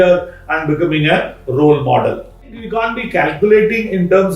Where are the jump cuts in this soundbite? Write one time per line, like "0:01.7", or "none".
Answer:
0:02.5